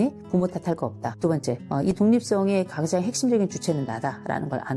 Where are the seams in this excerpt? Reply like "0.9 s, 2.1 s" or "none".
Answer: none